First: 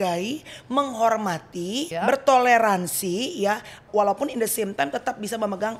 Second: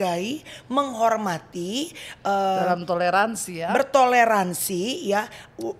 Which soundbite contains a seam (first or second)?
first